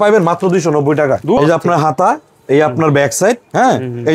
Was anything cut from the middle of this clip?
yes; 1 cut; at 1.4 s

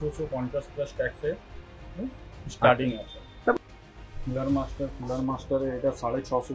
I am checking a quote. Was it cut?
yes; 1 cut; at 3.5 s

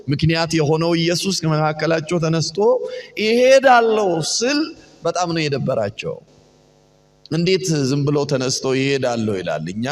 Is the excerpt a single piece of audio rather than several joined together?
yes; 0 cuts

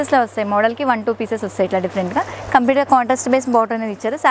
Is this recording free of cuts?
yes; 0 cuts

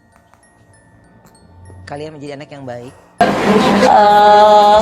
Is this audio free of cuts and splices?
no; 1 cut; at 3.2 s

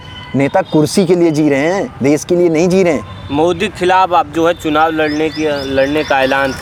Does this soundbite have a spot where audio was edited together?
no; 0 cuts

